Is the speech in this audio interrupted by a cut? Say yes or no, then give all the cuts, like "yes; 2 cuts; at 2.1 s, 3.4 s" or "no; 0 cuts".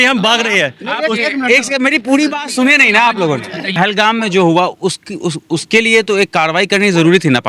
yes; 1 cut; at 3.7 s